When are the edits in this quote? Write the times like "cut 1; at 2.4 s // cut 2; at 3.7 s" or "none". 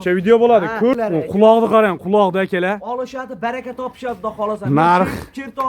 cut 1; at 0.9 s